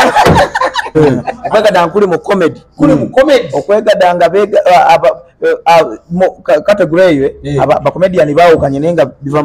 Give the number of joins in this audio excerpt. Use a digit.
1